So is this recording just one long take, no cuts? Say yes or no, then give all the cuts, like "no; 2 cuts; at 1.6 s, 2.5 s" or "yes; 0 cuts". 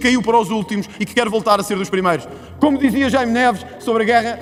yes; 0 cuts